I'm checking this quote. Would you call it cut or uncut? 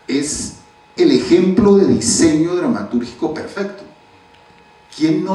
uncut